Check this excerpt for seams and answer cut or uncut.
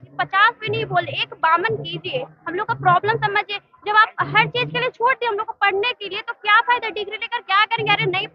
uncut